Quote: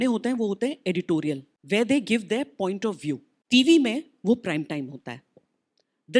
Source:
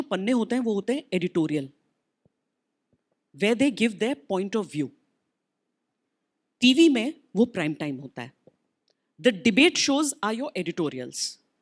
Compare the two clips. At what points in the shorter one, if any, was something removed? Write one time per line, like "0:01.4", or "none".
0:01.5
0:03.3